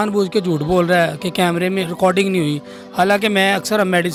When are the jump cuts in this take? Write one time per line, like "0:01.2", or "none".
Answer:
none